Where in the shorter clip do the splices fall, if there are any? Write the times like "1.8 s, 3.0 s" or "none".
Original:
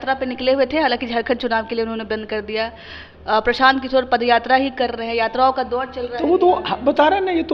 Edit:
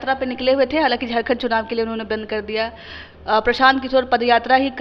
none